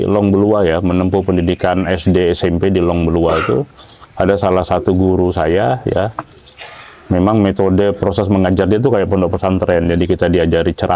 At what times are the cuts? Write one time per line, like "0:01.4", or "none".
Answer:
none